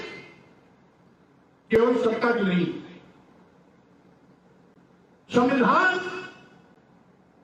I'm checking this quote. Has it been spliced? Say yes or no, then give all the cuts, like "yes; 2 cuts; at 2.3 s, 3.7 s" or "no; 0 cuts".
no; 0 cuts